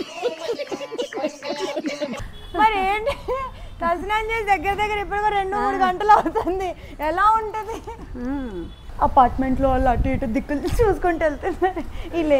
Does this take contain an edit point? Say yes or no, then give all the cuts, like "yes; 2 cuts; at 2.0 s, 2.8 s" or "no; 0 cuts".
yes; 2 cuts; at 2.3 s, 8.8 s